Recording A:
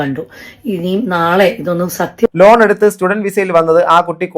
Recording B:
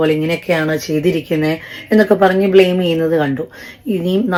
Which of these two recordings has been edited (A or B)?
A